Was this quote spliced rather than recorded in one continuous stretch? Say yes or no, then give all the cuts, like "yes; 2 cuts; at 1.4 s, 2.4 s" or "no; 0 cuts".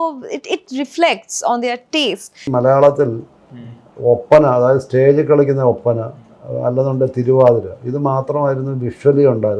yes; 1 cut; at 2.4 s